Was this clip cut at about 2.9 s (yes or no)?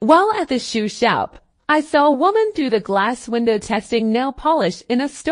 no